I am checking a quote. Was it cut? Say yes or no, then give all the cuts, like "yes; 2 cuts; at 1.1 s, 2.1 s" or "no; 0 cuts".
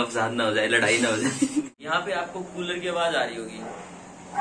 yes; 1 cut; at 1.8 s